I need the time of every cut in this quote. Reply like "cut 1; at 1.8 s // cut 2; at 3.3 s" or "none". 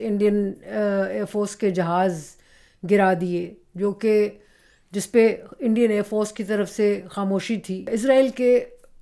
cut 1; at 7.9 s